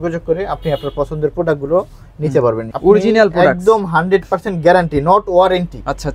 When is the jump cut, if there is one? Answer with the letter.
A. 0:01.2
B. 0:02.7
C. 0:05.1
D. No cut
B